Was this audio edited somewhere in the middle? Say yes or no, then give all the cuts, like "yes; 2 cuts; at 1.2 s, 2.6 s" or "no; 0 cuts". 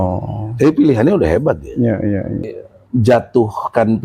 yes; 1 cut; at 2.5 s